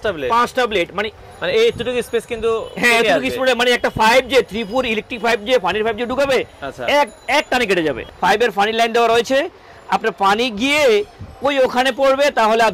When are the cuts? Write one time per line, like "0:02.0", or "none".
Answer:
0:01.1
0:08.0